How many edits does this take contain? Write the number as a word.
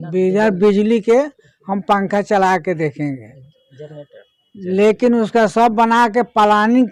zero